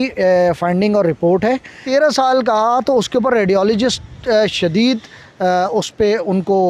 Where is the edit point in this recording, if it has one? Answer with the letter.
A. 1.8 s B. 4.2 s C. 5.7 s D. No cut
A